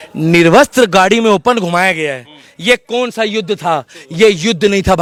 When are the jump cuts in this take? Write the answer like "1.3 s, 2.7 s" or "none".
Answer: none